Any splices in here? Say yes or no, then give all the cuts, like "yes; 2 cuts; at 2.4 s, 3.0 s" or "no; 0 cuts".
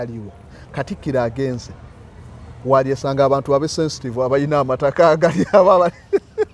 no; 0 cuts